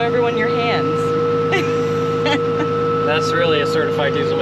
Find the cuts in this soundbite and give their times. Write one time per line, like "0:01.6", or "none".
none

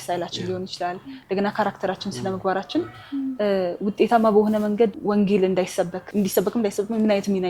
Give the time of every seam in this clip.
0:05.0
0:06.0

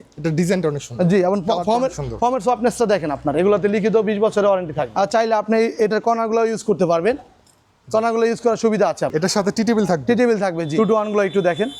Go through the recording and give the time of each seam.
0:04.9
0:09.1
0:10.8

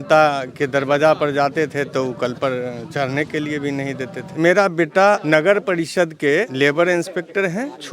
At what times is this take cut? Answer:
0:04.3
0:05.2
0:06.5

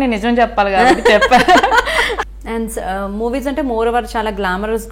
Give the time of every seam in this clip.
0:02.2

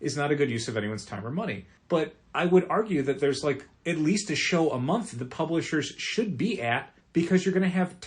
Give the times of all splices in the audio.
0:01.7
0:03.7
0:06.9

